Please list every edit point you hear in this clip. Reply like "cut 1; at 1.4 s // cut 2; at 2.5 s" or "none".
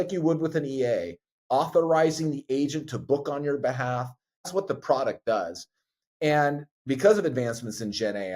cut 1; at 4.5 s

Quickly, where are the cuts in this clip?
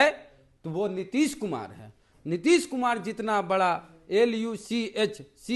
none

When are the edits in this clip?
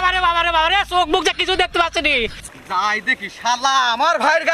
cut 1; at 2.6 s

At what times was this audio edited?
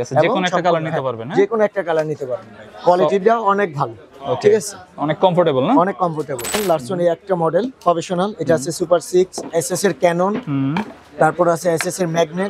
cut 1; at 6.5 s // cut 2; at 9.4 s

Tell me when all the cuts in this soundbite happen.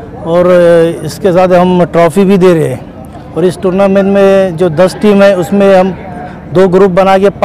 none

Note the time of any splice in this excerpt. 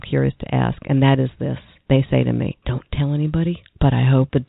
none

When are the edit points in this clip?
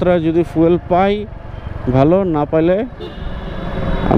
none

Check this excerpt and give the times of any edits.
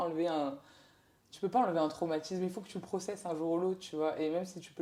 none

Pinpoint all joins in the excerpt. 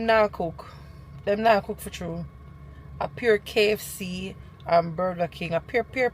none

